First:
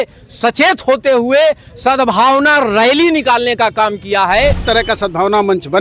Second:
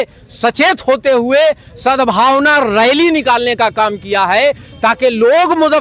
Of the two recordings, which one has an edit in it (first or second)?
first